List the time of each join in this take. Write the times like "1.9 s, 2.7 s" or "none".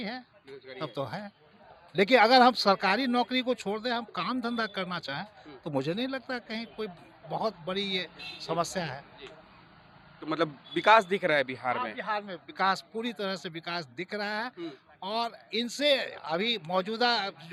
none